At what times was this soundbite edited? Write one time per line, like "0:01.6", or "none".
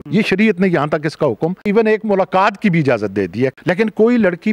0:01.7
0:03.6